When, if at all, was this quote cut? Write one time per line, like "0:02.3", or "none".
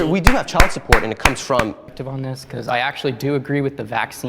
0:01.9